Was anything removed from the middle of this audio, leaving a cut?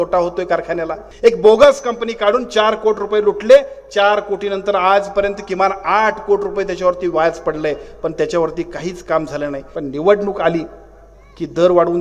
yes; 2 cuts; at 1.0 s, 9.7 s

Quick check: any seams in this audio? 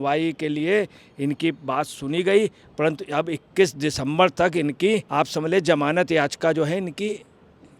yes; 1 cut; at 5.1 s

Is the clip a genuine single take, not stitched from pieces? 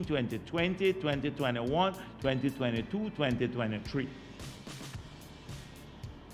yes; 0 cuts

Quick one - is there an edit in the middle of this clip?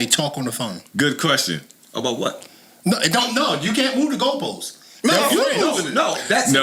no; 0 cuts

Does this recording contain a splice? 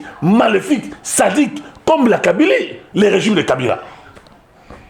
no; 0 cuts

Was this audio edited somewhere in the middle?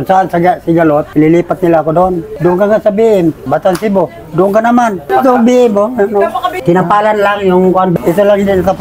yes; 4 cuts; at 1.1 s, 3.5 s, 5.0 s, 7.9 s

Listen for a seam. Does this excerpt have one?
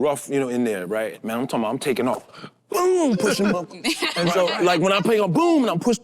yes; 1 cut; at 1.2 s

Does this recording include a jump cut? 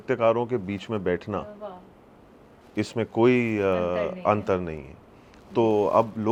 no; 0 cuts

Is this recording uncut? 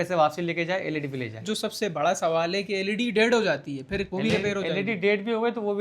no; 1 cut; at 1.4 s

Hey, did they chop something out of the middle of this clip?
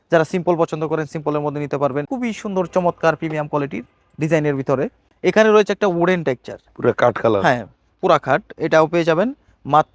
yes; 2 cuts; at 2.1 s, 5.0 s

